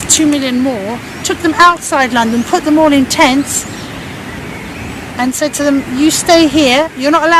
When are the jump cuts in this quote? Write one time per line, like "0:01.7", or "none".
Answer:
none